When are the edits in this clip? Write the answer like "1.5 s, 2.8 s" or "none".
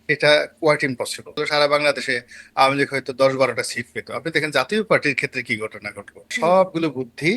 1.4 s, 6.3 s